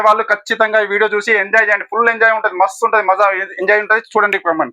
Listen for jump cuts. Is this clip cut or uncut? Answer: uncut